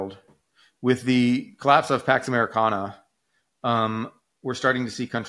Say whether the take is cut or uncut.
uncut